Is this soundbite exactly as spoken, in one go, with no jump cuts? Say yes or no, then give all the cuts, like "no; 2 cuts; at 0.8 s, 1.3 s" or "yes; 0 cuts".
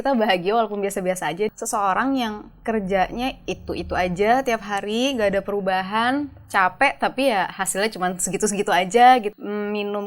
no; 2 cuts; at 1.6 s, 9.3 s